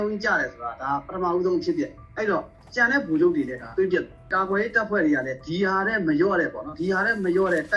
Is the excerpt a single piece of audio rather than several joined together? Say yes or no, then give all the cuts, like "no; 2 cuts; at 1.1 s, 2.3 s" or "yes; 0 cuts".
no; 1 cut; at 4.3 s